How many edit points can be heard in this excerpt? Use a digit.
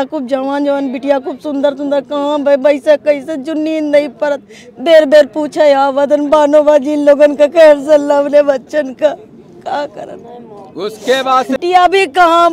1